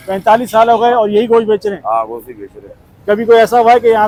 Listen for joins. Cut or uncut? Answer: uncut